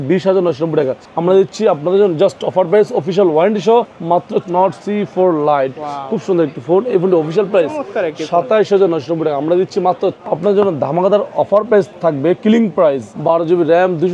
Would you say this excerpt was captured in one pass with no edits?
no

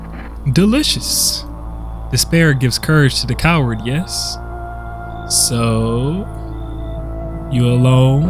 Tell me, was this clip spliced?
no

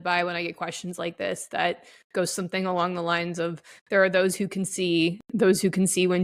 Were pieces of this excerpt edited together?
no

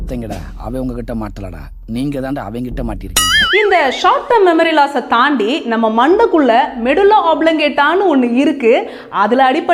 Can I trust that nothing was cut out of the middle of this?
yes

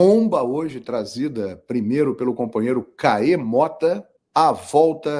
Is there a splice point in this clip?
yes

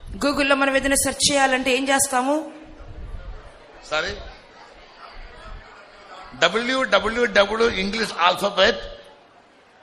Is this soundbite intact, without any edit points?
yes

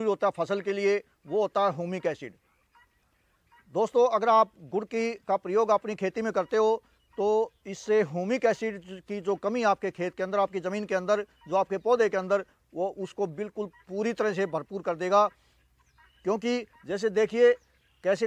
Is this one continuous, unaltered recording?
yes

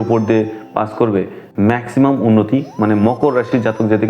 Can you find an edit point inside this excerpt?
yes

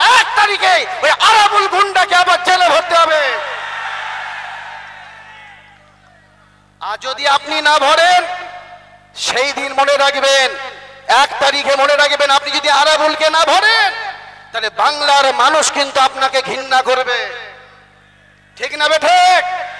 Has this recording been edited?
no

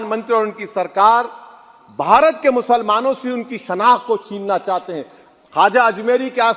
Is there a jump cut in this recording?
no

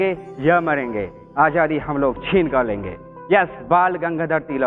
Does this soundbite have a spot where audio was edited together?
yes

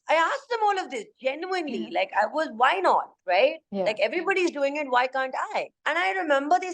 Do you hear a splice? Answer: yes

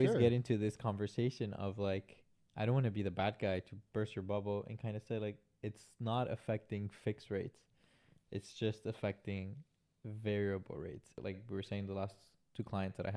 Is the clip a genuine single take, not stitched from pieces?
no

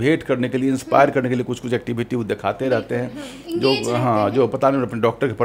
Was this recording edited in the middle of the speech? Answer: no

